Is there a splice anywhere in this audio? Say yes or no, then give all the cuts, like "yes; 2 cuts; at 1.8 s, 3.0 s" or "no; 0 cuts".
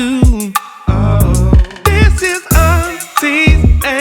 no; 0 cuts